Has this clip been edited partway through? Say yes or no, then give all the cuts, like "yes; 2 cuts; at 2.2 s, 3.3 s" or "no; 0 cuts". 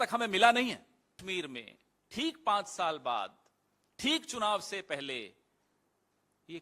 yes; 1 cut; at 1.2 s